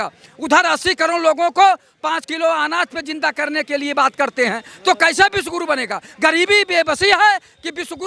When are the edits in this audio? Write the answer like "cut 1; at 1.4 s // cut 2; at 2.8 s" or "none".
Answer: none